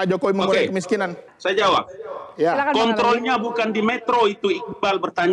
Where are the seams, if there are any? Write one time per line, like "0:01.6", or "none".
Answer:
0:01.3